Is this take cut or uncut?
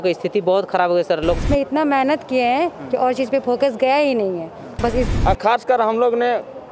cut